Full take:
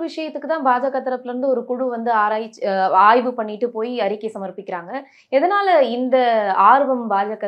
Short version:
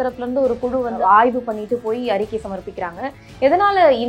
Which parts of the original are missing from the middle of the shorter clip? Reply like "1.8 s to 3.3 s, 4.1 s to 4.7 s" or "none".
2.0 s to 2.9 s